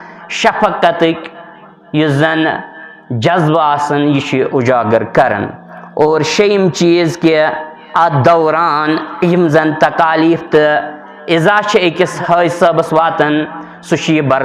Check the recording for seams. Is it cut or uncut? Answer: uncut